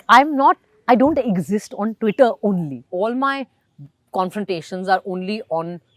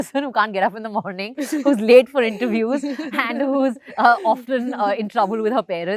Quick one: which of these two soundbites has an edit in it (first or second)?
first